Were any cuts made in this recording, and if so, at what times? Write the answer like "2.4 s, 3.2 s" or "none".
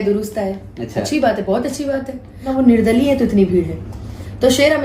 2.5 s